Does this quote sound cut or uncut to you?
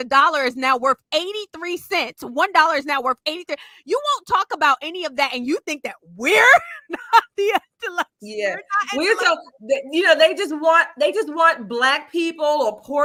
uncut